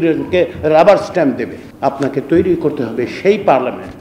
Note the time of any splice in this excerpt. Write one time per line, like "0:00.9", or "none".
0:01.6